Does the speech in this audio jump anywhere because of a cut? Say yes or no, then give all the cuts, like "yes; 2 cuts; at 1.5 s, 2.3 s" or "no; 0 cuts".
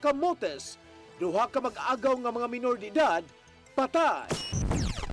yes; 1 cut; at 4.2 s